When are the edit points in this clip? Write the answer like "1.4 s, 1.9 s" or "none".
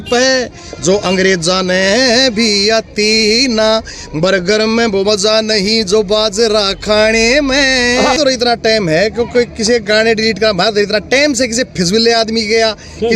8.2 s